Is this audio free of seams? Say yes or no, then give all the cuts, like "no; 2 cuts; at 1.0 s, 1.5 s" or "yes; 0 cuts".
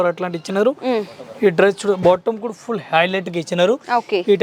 yes; 0 cuts